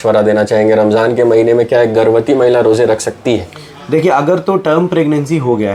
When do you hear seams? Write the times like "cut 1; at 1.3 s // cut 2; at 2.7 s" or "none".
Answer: none